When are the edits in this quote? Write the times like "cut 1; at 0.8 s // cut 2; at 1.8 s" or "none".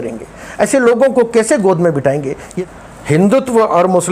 cut 1; at 2.4 s